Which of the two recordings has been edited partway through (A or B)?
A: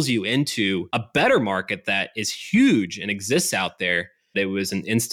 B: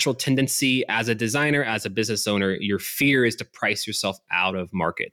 A